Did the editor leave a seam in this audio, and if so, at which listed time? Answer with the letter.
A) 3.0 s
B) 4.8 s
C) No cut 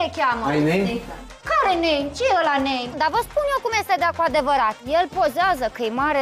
A